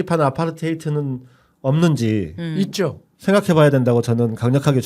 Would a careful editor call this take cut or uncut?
uncut